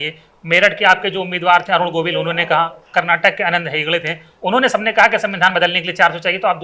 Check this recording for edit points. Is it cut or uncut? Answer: uncut